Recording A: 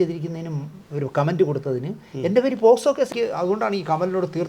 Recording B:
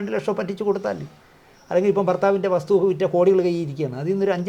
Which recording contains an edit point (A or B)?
A